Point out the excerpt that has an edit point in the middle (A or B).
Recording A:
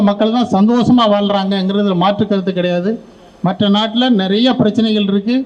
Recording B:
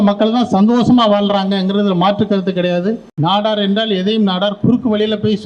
B